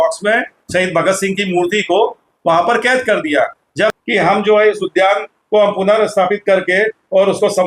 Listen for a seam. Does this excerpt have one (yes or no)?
yes